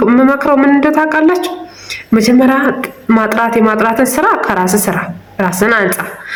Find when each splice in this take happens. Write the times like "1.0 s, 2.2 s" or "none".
none